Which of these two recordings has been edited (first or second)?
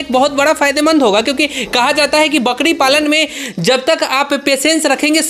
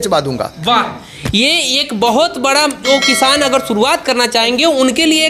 second